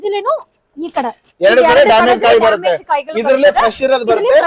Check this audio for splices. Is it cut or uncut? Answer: uncut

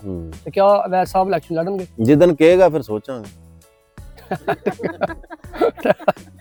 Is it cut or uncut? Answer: uncut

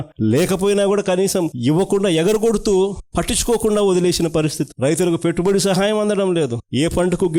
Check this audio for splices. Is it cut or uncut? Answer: uncut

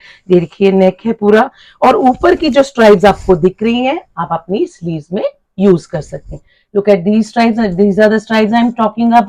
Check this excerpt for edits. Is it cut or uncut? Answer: uncut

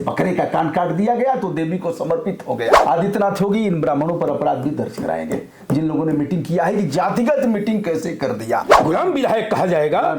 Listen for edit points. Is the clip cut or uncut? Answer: cut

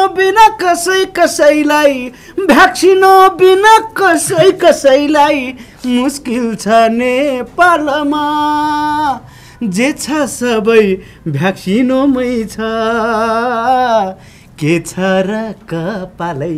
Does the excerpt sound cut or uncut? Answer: uncut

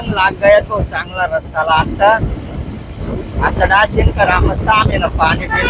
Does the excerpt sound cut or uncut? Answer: uncut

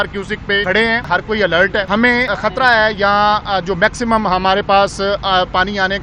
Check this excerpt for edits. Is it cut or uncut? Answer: cut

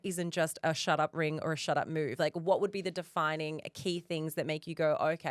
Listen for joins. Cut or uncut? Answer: uncut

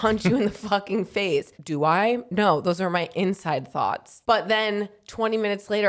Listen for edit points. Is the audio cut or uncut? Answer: cut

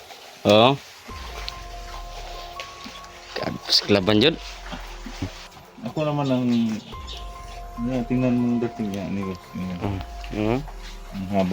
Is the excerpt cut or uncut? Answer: cut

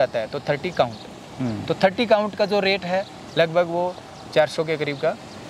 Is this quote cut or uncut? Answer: uncut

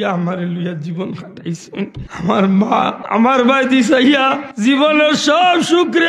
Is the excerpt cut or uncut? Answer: cut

